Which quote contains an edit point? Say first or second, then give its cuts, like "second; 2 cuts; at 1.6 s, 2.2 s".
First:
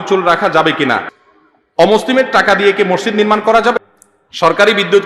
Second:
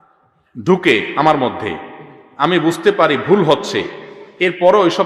first; 2 cuts; at 1.2 s, 3.7 s